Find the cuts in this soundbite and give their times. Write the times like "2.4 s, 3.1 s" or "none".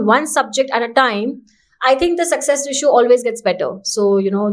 none